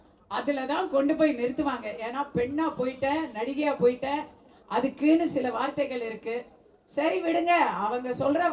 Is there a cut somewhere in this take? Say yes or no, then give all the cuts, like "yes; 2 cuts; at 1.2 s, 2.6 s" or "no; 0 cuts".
no; 0 cuts